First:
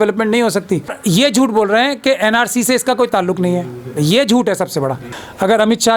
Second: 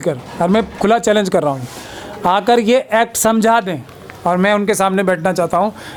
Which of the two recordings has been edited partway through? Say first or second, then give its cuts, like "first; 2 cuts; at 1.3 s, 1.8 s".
first; 2 cuts; at 1.0 s, 5.1 s